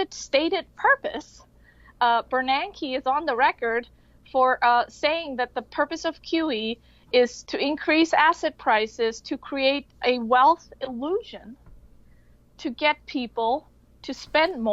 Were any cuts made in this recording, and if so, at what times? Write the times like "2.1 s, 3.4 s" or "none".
7.4 s